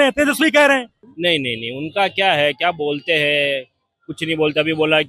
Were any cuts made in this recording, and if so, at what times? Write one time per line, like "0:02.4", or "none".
0:01.0